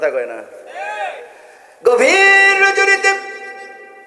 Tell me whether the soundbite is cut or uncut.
uncut